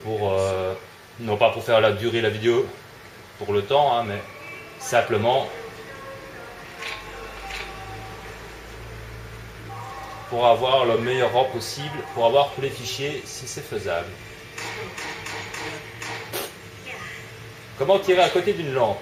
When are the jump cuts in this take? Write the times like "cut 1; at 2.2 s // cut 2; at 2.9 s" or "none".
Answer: none